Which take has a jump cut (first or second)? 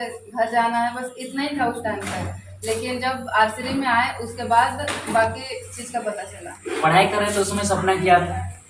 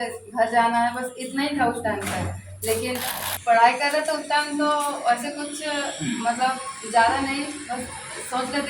second